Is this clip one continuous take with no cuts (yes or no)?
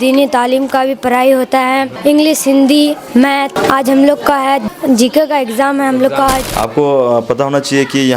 no